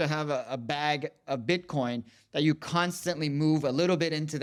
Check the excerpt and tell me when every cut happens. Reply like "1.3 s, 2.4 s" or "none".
none